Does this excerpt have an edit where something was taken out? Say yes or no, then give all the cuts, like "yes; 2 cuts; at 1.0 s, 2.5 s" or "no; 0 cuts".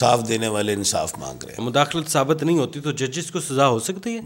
yes; 1 cut; at 1.6 s